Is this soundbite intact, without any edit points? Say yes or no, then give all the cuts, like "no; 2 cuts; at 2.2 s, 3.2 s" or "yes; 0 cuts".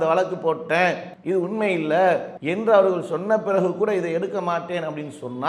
no; 2 cuts; at 1.1 s, 2.4 s